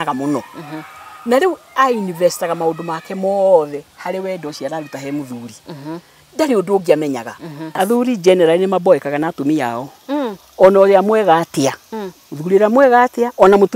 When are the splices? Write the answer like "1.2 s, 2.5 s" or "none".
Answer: 7.8 s